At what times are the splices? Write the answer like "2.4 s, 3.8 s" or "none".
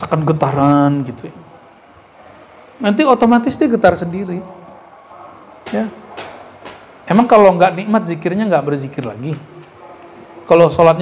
none